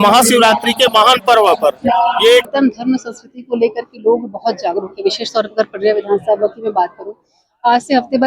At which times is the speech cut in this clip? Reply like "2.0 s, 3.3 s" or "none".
2.4 s

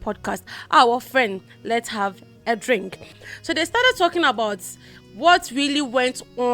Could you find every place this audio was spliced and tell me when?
3.2 s

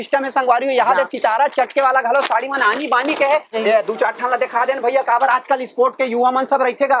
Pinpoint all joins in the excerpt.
3.5 s

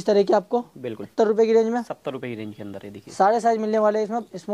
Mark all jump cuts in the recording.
1.0 s

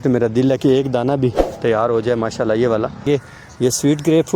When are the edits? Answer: 3.0 s

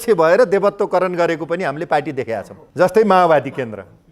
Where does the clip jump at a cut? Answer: 2.6 s

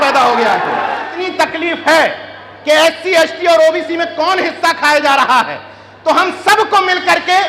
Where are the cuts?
1.1 s

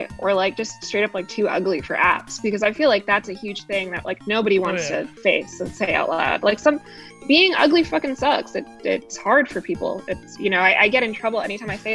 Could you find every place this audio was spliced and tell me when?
none

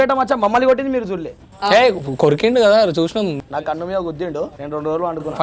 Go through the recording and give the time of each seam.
3.4 s, 4.6 s

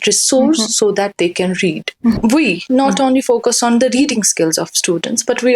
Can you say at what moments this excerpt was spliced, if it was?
2.2 s

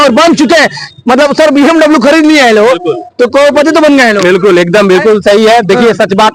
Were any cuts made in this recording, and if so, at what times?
none

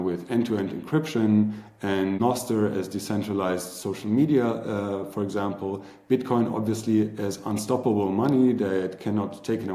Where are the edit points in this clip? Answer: 2.2 s

